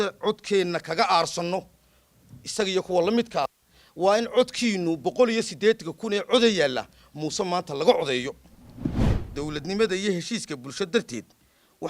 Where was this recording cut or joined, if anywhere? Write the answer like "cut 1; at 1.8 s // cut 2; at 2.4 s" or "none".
cut 1; at 9.0 s